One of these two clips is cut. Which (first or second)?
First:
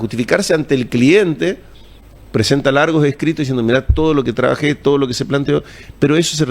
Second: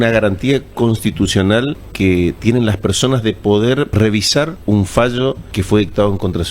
second